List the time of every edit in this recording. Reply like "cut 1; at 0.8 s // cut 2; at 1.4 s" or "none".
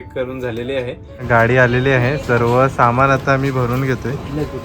cut 1; at 1.2 s